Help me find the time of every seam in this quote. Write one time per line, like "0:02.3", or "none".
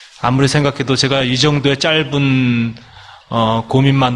0:02.2